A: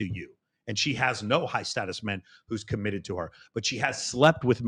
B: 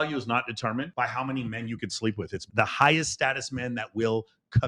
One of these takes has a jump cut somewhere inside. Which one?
B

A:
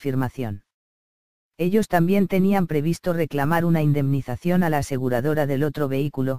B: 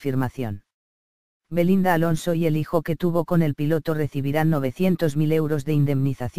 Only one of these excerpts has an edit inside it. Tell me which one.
A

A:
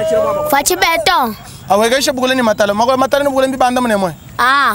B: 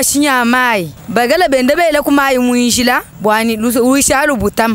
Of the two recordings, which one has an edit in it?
B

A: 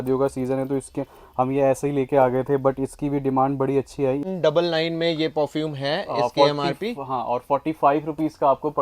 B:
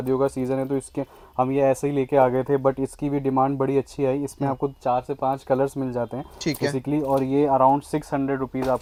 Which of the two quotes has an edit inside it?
A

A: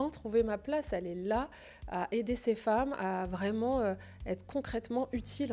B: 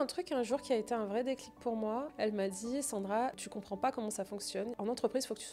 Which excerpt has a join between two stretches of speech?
B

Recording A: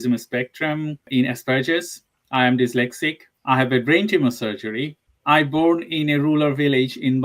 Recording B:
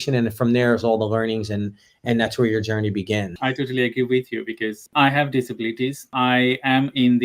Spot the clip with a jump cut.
B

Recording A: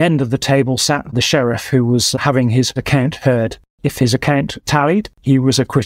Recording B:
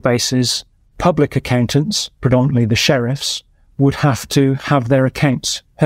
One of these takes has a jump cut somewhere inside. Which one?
A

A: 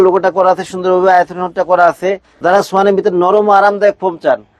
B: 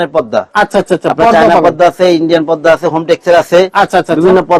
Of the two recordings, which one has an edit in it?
A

